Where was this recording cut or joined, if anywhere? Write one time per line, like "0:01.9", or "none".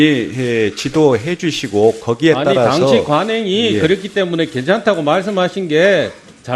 0:04.1